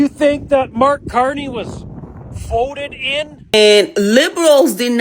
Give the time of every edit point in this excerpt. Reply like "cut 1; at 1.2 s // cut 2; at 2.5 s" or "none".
cut 1; at 3.5 s